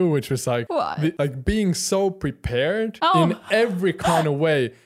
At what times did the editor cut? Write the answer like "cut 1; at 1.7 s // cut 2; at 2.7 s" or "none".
cut 1; at 0.9 s // cut 2; at 2.9 s